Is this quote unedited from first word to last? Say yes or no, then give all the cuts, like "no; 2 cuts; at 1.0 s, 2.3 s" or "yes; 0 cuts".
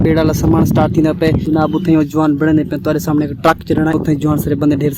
no; 2 cuts; at 1.4 s, 3.9 s